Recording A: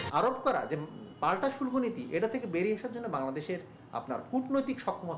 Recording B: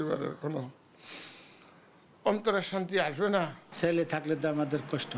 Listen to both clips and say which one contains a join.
B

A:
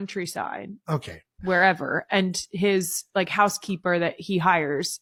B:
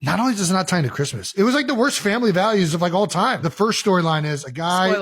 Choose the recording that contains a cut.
B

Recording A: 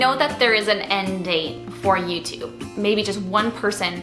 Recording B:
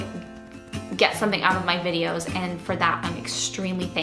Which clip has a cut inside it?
A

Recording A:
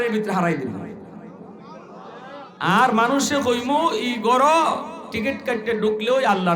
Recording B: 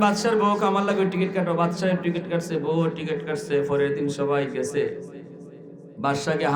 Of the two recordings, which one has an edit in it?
A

